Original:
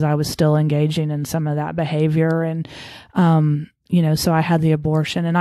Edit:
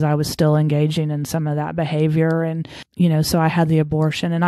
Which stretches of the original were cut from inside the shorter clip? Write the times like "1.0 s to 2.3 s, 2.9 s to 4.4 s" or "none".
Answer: 2.8 s to 3.7 s